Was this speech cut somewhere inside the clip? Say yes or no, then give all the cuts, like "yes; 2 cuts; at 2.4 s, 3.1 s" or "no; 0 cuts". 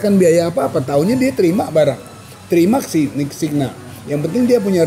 no; 0 cuts